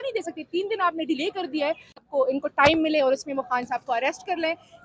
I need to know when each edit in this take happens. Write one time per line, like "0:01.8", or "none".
0:01.9